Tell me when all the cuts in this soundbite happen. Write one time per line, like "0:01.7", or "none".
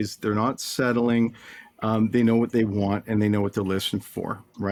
none